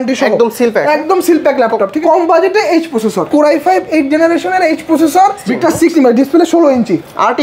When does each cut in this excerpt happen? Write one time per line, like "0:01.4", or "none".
0:01.9
0:05.4